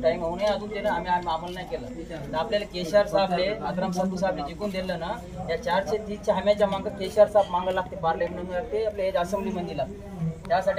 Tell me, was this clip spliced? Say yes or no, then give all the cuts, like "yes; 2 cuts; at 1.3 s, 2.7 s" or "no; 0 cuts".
no; 0 cuts